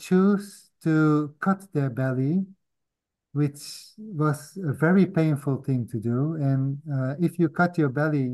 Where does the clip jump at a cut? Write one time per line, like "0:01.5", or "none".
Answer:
none